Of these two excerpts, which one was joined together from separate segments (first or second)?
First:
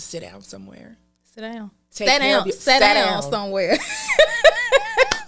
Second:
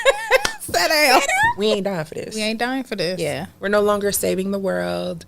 second